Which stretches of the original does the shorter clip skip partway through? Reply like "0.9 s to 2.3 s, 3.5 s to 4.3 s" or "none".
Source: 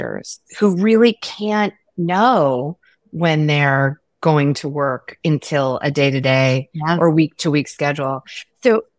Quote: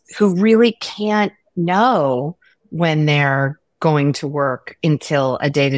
none